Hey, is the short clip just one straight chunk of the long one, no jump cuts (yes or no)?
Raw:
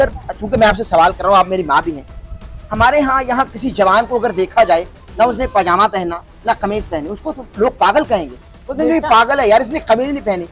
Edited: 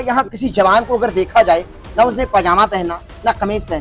yes